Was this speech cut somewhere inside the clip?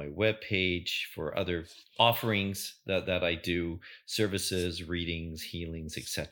no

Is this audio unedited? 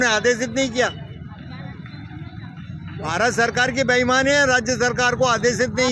yes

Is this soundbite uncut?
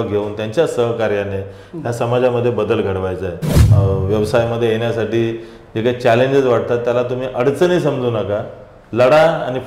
no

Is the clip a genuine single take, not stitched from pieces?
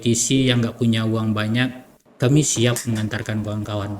yes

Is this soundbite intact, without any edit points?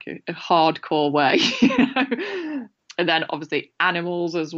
no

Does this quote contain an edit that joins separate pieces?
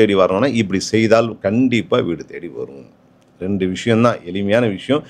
no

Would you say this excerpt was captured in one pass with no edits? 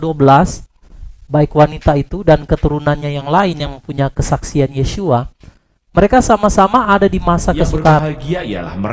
no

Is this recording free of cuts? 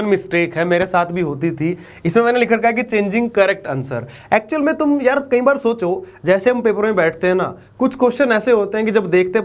yes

